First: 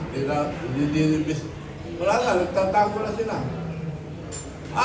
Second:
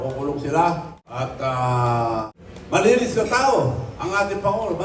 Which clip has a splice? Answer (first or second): second